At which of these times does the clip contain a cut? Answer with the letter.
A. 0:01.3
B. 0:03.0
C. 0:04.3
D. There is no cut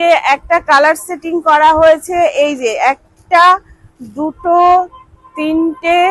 D